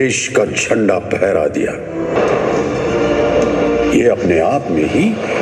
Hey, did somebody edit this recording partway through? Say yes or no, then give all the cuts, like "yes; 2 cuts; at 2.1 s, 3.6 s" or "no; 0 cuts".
yes; 1 cut; at 2.1 s